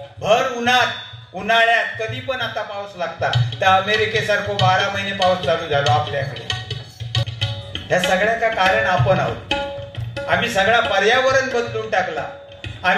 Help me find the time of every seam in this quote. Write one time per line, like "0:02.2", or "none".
0:07.2